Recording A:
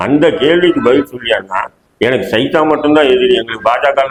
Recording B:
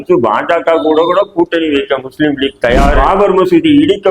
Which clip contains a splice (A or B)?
B